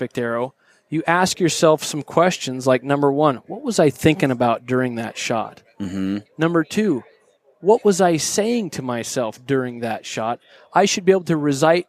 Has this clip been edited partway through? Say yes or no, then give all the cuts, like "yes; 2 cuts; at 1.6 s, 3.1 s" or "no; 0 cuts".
no; 0 cuts